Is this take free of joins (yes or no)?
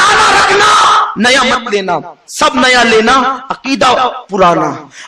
yes